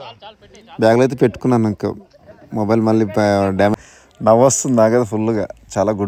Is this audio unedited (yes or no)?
no